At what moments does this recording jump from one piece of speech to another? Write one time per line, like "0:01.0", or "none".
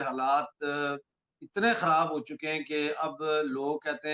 none